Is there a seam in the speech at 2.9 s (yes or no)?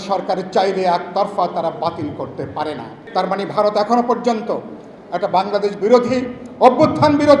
yes